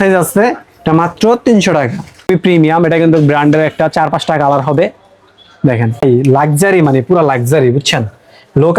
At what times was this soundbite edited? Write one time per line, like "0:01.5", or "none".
0:02.3
0:06.0